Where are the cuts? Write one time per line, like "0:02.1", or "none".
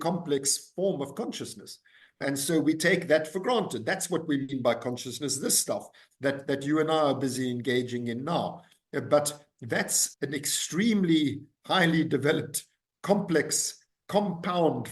0:02.2
0:10.0